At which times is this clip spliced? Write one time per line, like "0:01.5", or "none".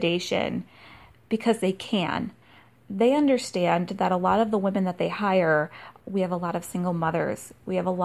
0:02.8
0:05.9